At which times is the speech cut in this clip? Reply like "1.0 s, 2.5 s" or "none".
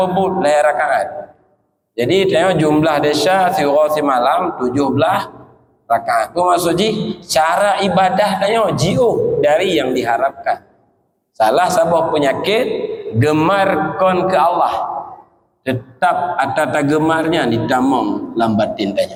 none